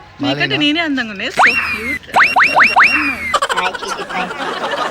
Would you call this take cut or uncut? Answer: cut